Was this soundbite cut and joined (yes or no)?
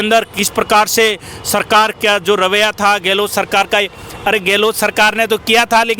no